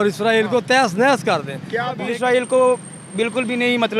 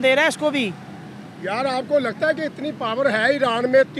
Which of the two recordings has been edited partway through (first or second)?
first